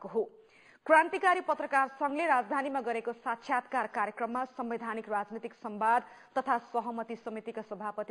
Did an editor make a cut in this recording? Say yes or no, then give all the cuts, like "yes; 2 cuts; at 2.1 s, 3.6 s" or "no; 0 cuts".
no; 0 cuts